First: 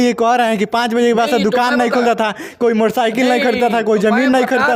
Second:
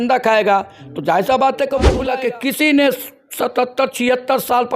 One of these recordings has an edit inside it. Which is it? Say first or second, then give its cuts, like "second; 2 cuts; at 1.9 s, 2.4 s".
second; 1 cut; at 2.0 s